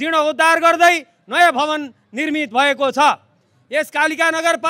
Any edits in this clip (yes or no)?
no